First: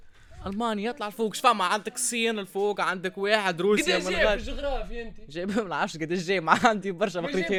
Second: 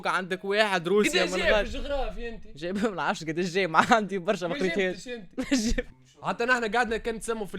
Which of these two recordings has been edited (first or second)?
second